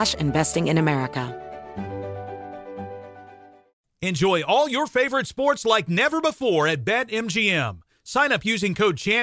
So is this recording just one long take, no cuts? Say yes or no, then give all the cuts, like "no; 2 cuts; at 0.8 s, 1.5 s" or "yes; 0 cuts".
no; 1 cut; at 1.3 s